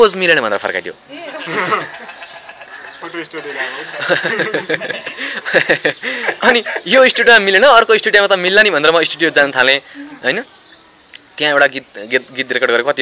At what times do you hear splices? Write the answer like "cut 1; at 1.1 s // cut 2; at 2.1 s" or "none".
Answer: none